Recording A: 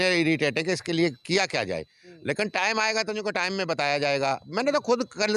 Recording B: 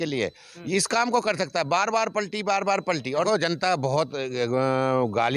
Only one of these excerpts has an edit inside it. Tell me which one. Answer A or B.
B